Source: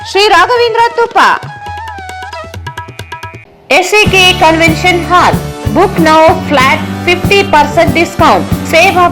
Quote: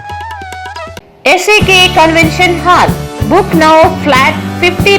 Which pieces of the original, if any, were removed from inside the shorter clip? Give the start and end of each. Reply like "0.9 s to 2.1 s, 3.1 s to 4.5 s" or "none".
2.6 s to 3.5 s